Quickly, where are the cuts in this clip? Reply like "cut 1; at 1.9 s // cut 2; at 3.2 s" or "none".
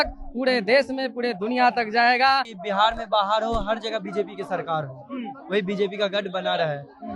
cut 1; at 2.5 s